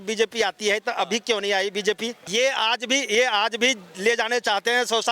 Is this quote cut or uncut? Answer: cut